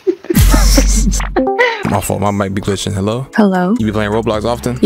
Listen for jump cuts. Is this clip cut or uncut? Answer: cut